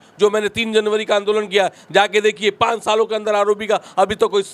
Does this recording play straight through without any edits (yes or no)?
yes